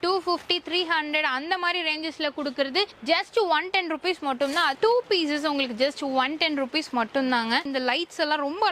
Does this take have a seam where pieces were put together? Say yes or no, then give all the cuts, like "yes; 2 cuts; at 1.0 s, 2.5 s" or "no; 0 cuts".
yes; 2 cuts; at 4.8 s, 7.6 s